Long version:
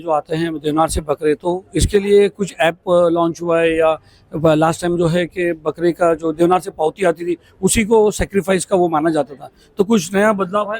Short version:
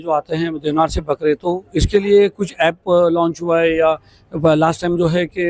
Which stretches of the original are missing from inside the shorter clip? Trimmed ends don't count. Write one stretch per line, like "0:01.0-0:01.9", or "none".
none